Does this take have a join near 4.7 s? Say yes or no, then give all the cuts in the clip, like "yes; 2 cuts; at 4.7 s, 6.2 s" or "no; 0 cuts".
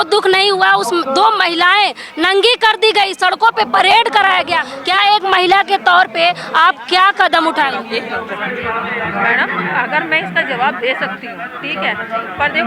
yes; 1 cut; at 4.7 s